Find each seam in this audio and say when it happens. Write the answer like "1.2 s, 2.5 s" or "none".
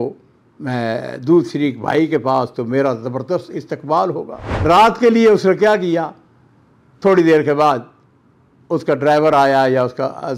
4.4 s